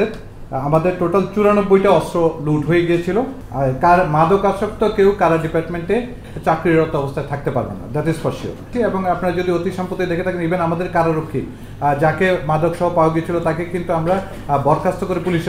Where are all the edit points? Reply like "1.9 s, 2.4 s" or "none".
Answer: 3.4 s, 8.7 s